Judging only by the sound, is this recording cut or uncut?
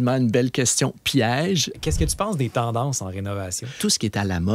cut